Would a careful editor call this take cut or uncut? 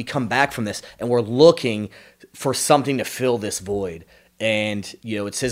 uncut